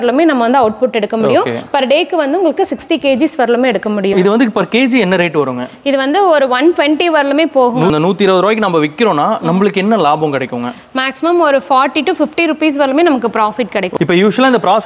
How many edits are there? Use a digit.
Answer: 3